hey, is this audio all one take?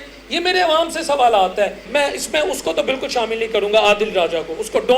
no; 1 cut; at 1.9 s

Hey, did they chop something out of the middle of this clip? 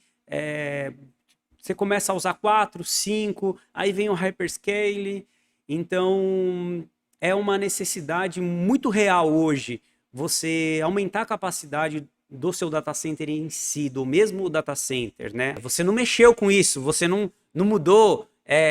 yes; 1 cut; at 15.6 s

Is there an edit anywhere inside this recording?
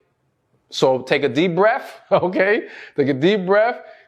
no; 0 cuts

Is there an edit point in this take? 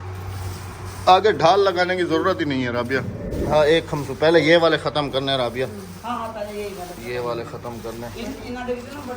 yes; 1 cut; at 3.3 s

